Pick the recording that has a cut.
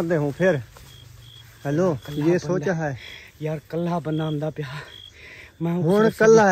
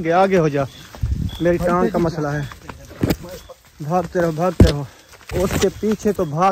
second; 1 cut; at 5.3 s

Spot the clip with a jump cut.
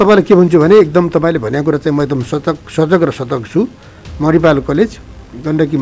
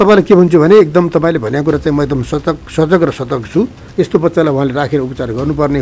second; 1 cut; at 3.8 s

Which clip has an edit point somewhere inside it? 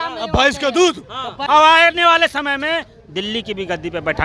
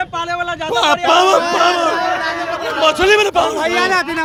first; 1 cut; at 1.4 s

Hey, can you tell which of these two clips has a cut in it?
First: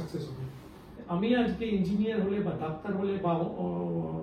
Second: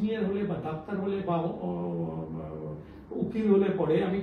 first; 1 cut; at 1.0 s

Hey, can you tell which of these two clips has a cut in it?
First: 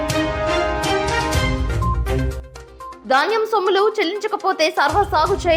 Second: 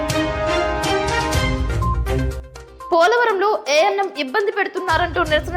second; 1 cut; at 2.8 s

